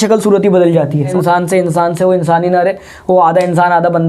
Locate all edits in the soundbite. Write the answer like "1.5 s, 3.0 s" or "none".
1.1 s